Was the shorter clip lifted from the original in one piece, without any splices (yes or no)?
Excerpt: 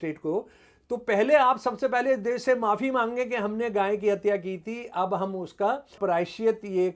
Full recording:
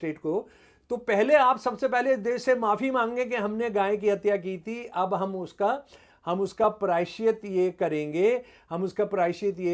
no